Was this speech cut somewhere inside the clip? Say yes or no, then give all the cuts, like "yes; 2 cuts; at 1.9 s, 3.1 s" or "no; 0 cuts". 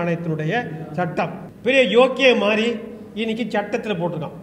yes; 1 cut; at 1.4 s